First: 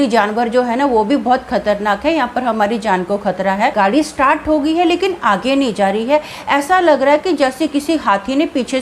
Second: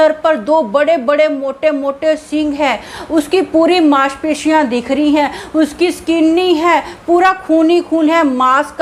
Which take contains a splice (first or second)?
first